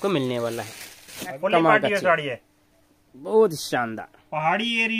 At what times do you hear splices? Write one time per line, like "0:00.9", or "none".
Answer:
0:01.4